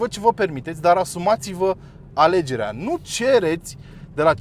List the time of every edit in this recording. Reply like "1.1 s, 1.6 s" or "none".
none